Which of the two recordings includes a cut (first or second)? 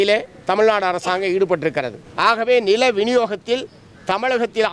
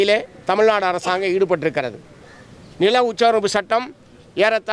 first